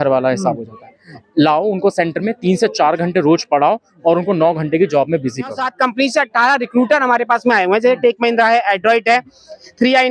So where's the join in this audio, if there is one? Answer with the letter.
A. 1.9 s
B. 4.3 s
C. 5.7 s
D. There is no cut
C